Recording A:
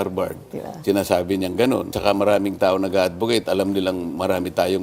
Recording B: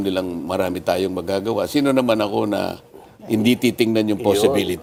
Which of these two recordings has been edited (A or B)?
A